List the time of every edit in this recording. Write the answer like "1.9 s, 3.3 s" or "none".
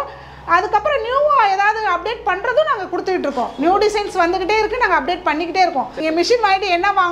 6.0 s